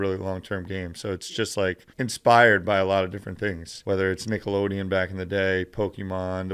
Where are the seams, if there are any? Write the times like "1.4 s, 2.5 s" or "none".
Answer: 1.9 s, 3.7 s

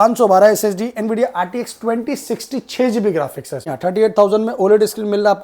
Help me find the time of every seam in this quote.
3.7 s

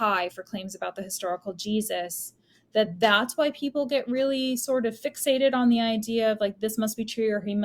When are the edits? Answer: none

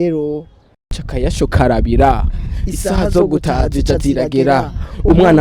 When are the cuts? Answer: 1.0 s

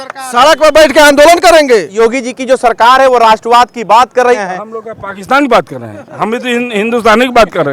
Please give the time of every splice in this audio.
1.9 s, 4.4 s

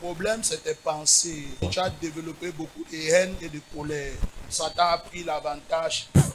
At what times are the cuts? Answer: 1.7 s, 4.5 s

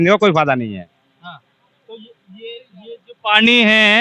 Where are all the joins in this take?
none

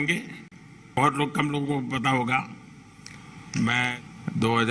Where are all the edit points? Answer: 1.0 s, 3.9 s

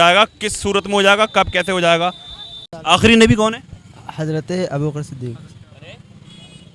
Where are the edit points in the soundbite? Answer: 2.7 s

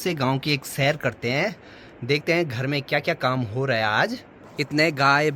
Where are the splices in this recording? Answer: 4.4 s

